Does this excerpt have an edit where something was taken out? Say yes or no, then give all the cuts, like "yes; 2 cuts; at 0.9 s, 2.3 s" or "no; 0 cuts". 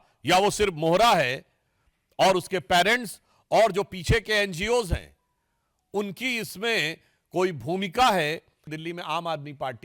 yes; 1 cut; at 8.7 s